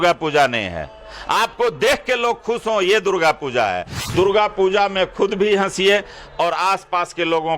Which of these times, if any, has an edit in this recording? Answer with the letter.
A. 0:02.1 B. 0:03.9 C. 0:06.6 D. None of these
B